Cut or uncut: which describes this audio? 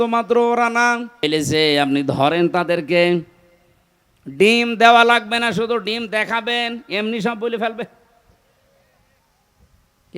cut